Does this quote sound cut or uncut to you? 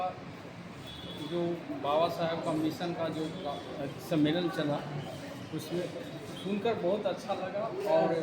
uncut